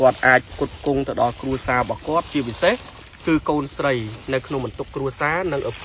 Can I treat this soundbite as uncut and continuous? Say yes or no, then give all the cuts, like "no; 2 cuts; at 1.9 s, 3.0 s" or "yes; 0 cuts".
yes; 0 cuts